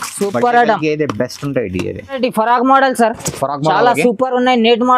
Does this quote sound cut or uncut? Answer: cut